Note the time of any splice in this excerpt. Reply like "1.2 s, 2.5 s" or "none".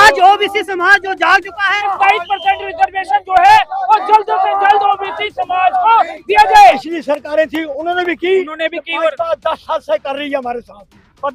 1.8 s, 6.9 s

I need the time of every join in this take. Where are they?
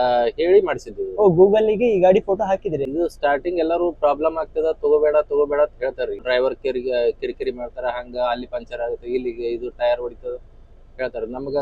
2.9 s, 6.2 s

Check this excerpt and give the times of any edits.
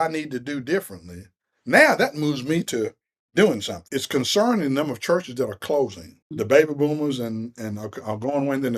3.7 s, 6.3 s

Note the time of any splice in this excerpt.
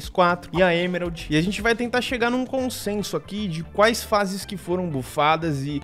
1.2 s

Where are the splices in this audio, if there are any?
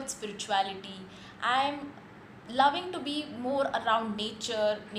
none

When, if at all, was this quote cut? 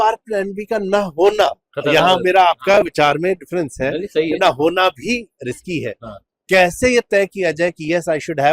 none

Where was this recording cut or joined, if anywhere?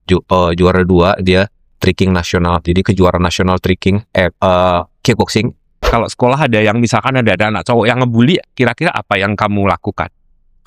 5.7 s

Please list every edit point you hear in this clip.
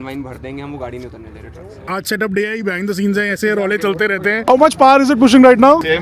1.9 s, 4.5 s

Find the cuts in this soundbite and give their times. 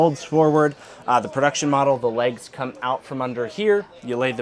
none

